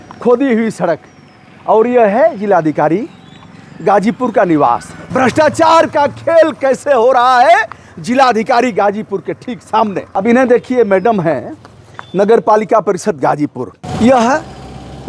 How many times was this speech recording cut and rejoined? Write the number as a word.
three